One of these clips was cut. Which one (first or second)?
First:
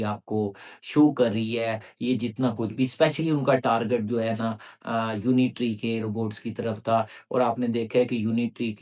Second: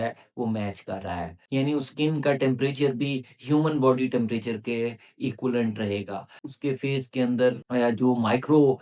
second